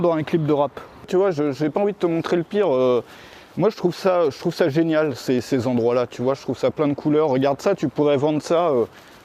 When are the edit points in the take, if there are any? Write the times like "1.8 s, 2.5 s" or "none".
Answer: 1.1 s

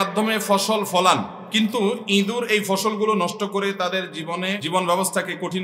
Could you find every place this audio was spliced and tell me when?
1.4 s, 4.6 s

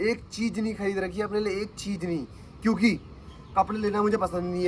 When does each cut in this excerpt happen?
none

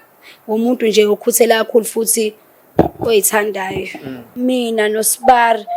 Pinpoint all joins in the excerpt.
4.3 s

